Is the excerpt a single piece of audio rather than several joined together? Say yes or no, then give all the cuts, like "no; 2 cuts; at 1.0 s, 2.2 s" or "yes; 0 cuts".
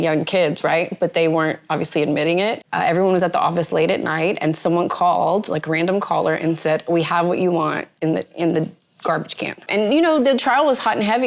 no; 3 cuts; at 2.7 s, 7.9 s, 9.7 s